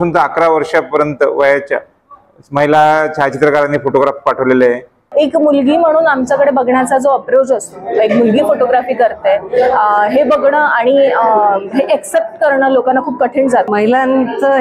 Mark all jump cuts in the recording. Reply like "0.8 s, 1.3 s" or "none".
5.1 s, 13.7 s